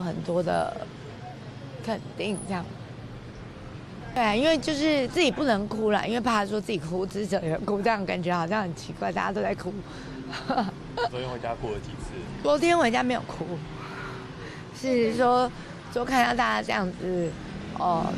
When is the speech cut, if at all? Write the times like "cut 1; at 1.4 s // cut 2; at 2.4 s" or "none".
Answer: cut 1; at 4.2 s // cut 2; at 12.4 s